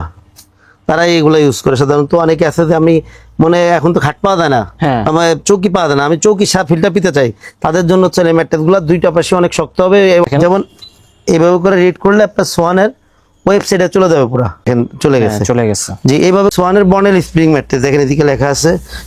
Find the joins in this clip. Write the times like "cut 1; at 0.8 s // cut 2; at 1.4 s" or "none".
cut 1; at 10.3 s // cut 2; at 14.7 s // cut 3; at 16.5 s

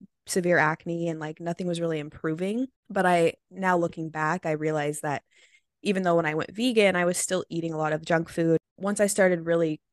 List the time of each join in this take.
cut 1; at 2.8 s // cut 2; at 8.7 s

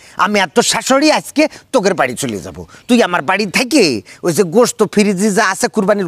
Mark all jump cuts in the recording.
none

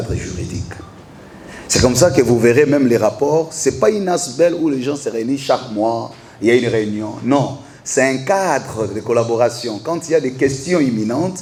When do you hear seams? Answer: none

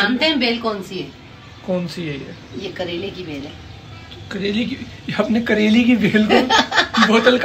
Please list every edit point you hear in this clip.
none

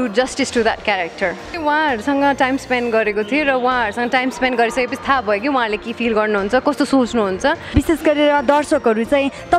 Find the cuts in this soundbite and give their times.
cut 1; at 1.5 s // cut 2; at 7.7 s

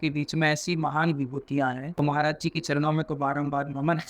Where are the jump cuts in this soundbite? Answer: cut 1; at 1.8 s

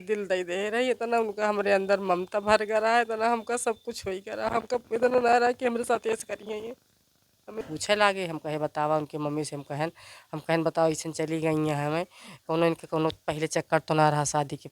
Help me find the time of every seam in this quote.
cut 1; at 7.7 s

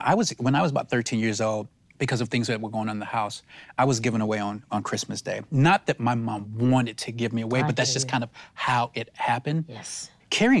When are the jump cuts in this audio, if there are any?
none

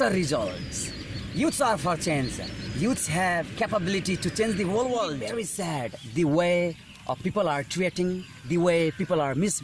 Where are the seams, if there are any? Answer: cut 1; at 5.5 s

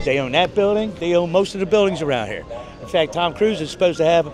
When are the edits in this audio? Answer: cut 1; at 1.0 s

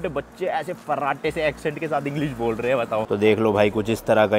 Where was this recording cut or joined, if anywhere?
cut 1; at 3.1 s

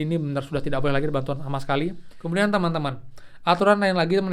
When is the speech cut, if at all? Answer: cut 1; at 2.1 s

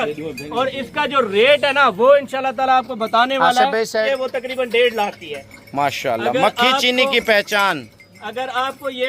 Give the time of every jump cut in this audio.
cut 1; at 4.1 s

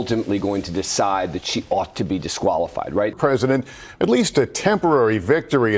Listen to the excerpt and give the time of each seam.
cut 1; at 3.1 s

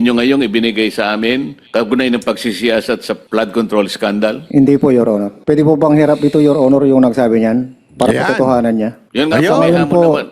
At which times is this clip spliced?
cut 1; at 1.6 s // cut 2; at 3.2 s // cut 3; at 4.4 s // cut 4; at 5.3 s // cut 5; at 9.0 s

